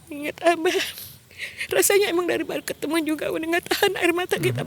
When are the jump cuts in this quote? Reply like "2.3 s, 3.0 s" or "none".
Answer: none